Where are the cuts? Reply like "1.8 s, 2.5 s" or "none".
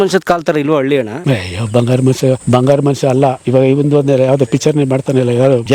none

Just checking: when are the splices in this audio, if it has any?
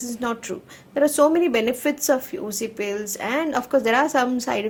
none

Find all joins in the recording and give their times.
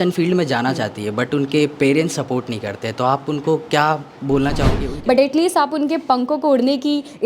4.8 s

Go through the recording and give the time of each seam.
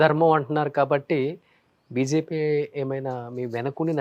none

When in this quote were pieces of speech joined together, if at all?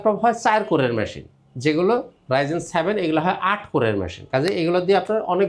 none

